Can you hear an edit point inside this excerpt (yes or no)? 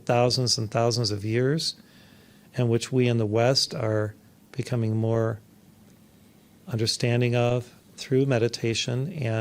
no